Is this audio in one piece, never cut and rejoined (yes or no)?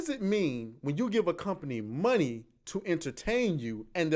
yes